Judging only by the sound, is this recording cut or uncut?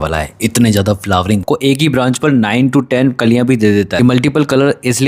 cut